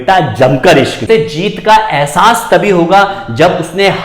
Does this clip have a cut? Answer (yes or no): yes